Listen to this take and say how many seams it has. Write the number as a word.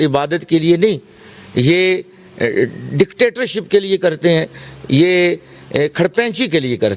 zero